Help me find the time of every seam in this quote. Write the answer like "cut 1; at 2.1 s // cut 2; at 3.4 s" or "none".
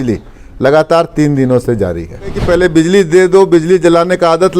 cut 1; at 2.4 s